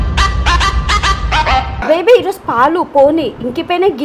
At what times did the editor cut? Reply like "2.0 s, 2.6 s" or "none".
1.8 s